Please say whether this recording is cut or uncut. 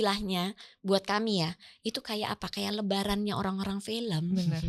uncut